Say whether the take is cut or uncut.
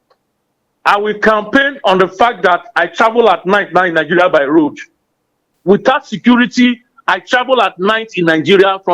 cut